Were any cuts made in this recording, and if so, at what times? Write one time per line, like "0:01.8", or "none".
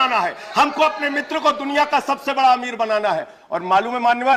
none